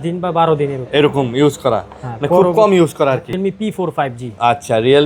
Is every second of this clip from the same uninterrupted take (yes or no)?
no